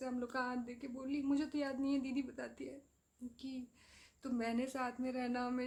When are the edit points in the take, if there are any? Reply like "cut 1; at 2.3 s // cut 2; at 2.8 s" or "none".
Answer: none